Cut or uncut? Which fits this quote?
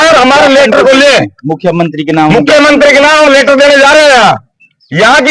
uncut